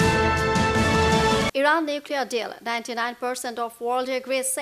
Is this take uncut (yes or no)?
yes